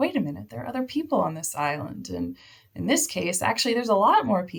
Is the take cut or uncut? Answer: uncut